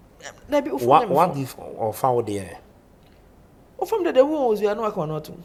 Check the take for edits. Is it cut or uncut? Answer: uncut